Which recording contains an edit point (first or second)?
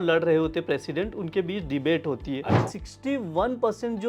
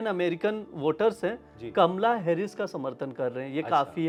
first